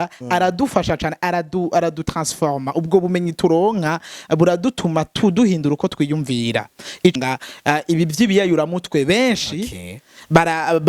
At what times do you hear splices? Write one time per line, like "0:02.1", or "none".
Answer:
0:07.1